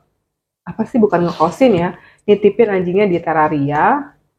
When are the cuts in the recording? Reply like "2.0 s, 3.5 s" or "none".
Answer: none

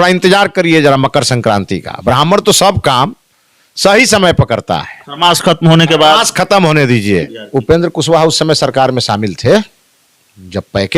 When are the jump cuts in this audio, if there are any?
7.4 s

